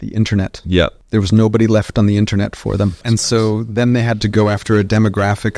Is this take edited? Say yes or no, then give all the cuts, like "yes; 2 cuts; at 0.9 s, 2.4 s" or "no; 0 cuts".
yes; 3 cuts; at 1.0 s, 3.0 s, 4.2 s